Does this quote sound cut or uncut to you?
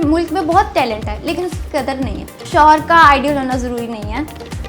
cut